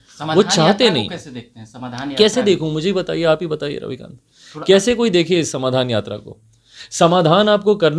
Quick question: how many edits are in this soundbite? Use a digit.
0